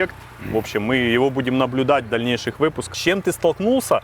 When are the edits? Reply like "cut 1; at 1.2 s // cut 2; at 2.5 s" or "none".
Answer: cut 1; at 2.8 s